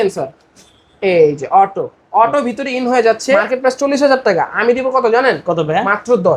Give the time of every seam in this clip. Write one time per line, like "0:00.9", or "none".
0:03.5